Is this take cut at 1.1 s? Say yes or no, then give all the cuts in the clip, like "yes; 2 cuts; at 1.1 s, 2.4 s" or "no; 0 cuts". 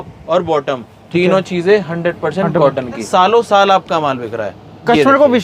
no; 1 cut; at 3.0 s